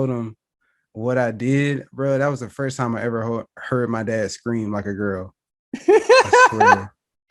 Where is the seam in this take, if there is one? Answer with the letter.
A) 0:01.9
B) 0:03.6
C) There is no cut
C